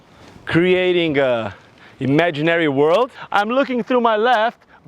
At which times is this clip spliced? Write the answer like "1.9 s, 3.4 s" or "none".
3.2 s